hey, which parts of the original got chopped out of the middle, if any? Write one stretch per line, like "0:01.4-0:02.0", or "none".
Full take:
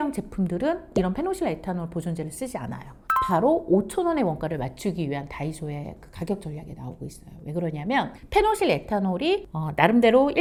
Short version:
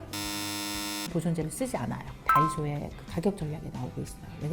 0:03.3-0:05.5